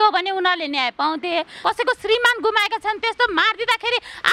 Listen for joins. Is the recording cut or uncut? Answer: cut